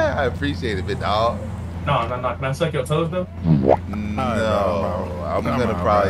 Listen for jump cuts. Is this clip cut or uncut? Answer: cut